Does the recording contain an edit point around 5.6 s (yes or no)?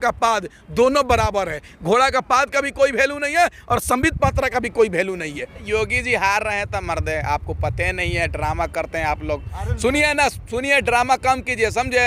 yes